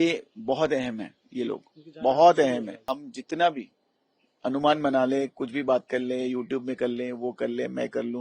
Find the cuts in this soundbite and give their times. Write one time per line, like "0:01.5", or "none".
0:02.8